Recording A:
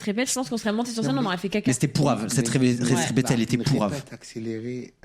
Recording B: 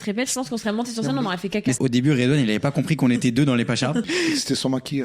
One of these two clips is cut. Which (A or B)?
B